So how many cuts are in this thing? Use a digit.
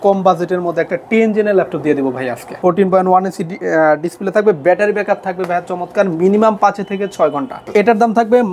2